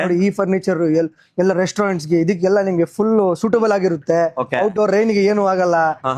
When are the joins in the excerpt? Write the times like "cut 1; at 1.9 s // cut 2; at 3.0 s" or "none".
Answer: none